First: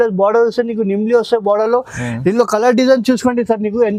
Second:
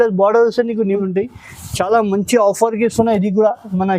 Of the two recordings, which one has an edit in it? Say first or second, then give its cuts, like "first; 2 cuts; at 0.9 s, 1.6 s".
second; 1 cut; at 1.0 s